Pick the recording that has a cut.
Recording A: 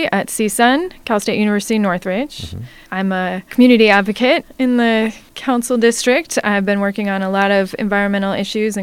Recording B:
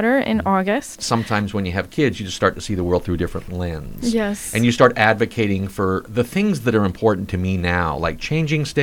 B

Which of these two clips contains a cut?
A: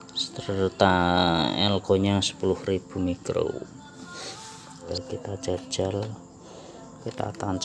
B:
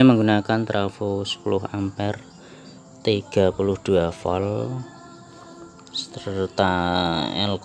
A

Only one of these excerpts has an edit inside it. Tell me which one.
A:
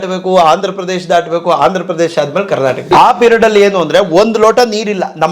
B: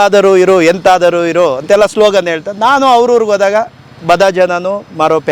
A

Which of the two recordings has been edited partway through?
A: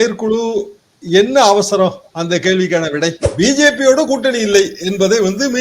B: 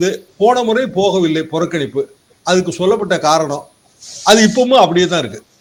A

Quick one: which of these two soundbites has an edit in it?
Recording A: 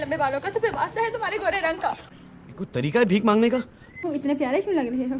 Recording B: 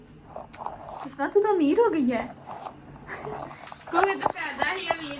A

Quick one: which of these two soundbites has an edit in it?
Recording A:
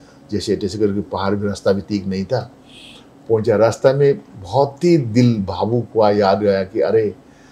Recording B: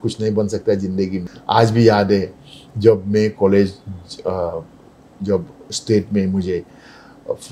B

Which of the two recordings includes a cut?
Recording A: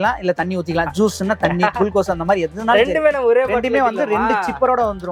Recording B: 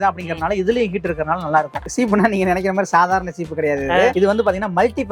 B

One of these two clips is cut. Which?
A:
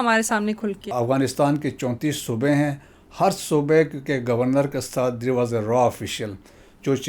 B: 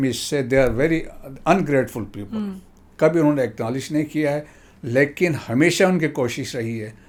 A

